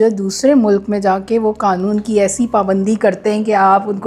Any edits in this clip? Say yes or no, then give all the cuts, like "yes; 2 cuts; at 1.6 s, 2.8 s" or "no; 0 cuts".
no; 0 cuts